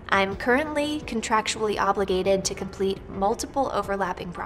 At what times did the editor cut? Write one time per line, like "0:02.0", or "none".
none